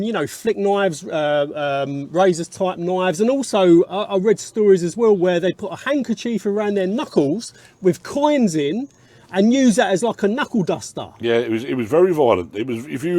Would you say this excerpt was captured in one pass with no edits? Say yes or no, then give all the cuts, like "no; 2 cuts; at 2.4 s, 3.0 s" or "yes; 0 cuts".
yes; 0 cuts